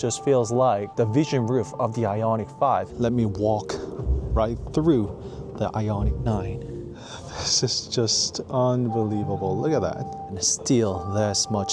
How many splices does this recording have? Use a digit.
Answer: 4